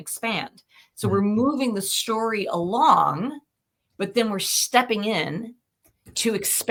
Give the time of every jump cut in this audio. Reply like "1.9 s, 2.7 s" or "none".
none